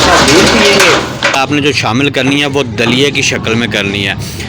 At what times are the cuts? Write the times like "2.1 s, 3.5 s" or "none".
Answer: 1.3 s